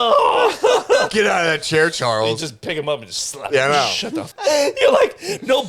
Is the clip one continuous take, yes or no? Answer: no